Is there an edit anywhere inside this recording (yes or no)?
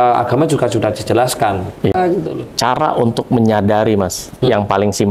yes